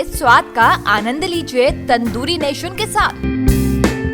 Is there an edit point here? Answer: no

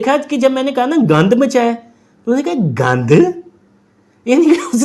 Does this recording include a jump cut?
no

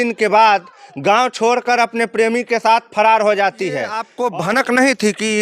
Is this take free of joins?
no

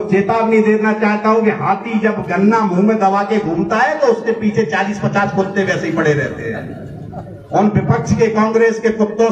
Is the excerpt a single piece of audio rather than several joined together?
yes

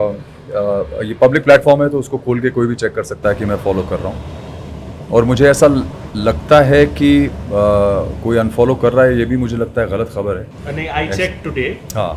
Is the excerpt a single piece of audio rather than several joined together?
yes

